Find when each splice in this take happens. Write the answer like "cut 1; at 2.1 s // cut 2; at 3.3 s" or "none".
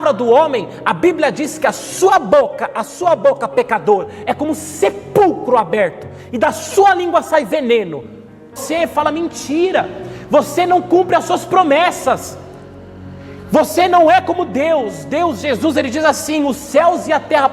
cut 1; at 8.6 s